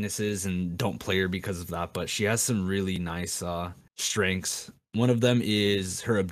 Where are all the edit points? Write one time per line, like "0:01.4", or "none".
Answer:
none